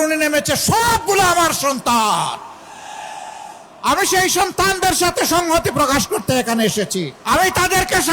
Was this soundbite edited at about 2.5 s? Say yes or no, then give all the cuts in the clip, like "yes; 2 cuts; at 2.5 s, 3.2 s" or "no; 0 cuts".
no; 1 cut; at 7.2 s